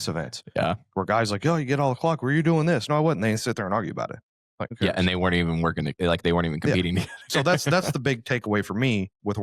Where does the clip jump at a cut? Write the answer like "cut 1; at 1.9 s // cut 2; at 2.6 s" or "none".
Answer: cut 1; at 4.6 s

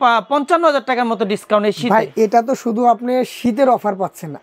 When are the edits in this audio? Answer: none

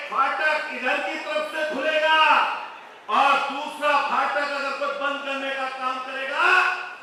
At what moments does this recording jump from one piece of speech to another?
none

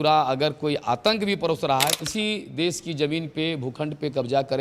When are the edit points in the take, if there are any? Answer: cut 1; at 2.0 s

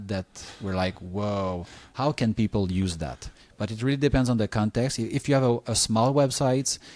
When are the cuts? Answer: none

